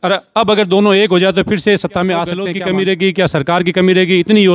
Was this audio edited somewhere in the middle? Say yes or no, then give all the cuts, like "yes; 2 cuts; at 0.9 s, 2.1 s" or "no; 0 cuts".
yes; 1 cut; at 2.5 s